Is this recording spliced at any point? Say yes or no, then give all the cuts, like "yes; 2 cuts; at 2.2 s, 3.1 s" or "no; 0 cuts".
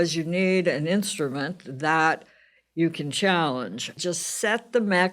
yes; 1 cut; at 4.0 s